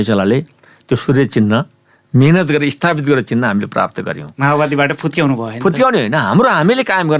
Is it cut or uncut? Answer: uncut